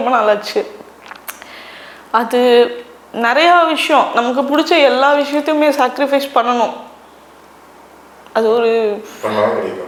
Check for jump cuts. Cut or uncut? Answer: uncut